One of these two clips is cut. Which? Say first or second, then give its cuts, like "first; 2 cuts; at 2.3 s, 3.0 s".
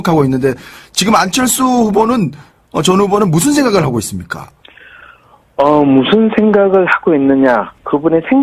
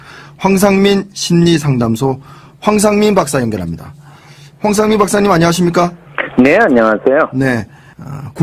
first; 1 cut; at 6.1 s